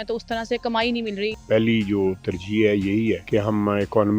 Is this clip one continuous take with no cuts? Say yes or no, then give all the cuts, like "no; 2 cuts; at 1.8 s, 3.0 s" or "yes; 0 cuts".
no; 2 cuts; at 1.3 s, 3.2 s